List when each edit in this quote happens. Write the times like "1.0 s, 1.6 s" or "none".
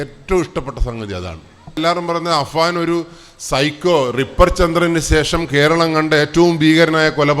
1.8 s